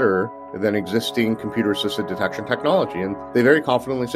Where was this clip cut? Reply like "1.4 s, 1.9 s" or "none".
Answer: 3.2 s